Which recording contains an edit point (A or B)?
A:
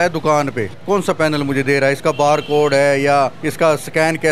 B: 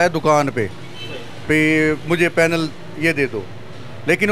A